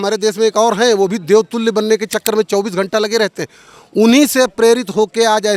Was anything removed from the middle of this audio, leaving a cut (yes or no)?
no